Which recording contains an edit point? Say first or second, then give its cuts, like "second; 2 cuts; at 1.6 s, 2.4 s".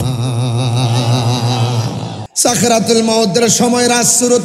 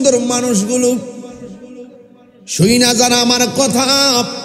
first; 1 cut; at 2.2 s